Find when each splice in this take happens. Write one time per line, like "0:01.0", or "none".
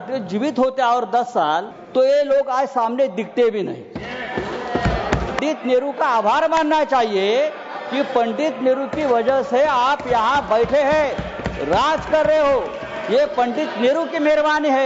0:01.8
0:05.4

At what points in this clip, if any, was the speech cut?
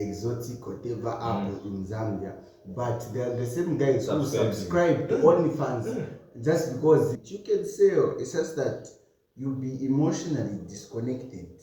0:07.3

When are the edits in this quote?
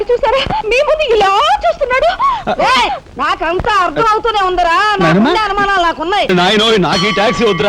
0:06.3

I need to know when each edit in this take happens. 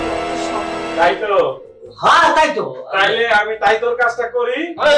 0:01.0

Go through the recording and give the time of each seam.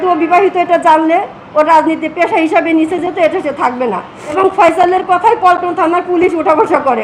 0:04.3

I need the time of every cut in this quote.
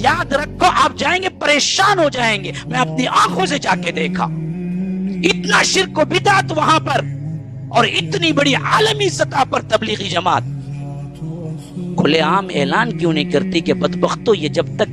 none

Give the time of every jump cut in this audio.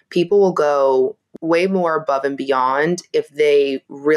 0:01.2

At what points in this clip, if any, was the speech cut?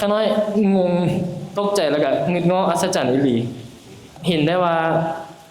0:04.1

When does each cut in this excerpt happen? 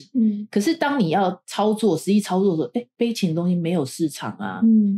none

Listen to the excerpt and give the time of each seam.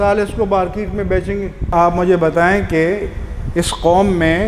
0:01.7

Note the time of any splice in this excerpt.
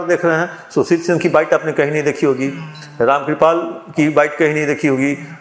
none

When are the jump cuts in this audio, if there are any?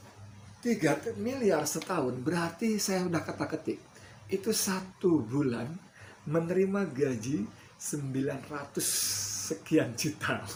none

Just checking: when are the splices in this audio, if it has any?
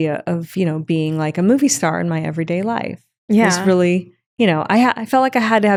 none

